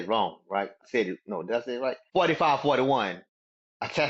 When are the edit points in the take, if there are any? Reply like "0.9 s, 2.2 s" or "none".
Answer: 0.8 s, 2.0 s